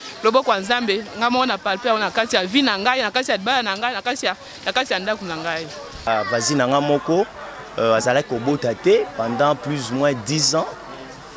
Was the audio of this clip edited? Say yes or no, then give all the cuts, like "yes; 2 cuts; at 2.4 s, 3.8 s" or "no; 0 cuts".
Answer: yes; 1 cut; at 6.1 s